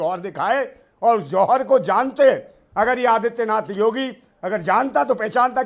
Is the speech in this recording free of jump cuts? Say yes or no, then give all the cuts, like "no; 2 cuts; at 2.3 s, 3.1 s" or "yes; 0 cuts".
yes; 0 cuts